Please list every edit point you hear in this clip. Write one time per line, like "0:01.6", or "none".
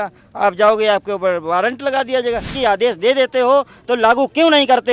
0:02.5